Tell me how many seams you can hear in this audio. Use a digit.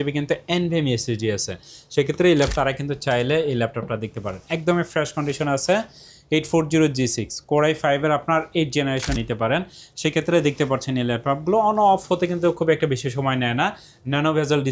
2